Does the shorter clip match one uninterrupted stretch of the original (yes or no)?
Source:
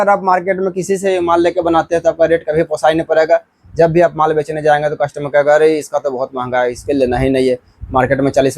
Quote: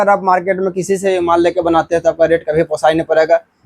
yes